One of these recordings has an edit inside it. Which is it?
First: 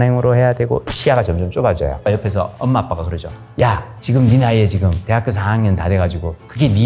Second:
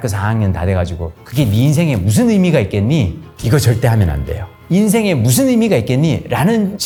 first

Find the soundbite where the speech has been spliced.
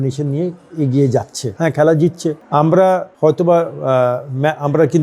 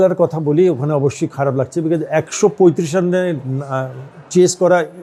first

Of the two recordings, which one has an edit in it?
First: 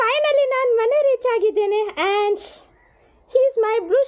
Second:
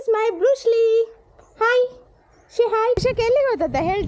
second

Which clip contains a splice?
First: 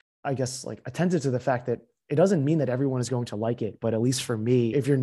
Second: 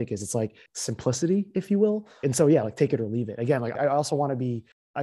second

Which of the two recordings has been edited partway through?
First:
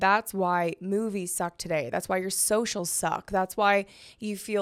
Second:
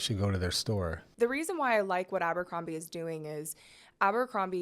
second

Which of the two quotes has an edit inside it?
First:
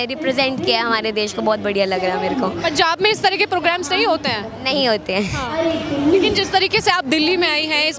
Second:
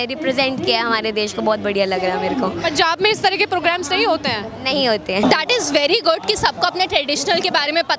second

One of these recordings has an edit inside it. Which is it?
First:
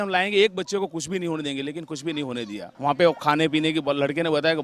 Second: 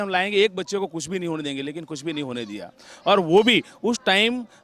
first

